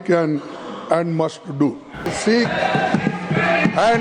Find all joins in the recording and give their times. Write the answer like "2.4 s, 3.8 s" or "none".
2.1 s